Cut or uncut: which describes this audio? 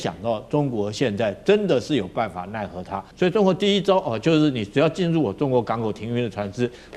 cut